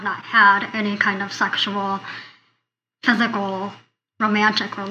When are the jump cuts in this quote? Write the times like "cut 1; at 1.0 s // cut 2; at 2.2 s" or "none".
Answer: none